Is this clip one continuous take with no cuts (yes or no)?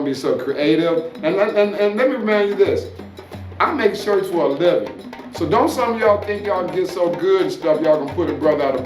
yes